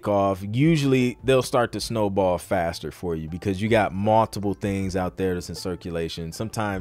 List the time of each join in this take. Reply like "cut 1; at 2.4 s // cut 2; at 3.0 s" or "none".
none